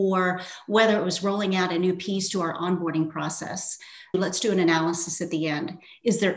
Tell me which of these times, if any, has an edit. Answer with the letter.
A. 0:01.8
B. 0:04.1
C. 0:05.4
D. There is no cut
B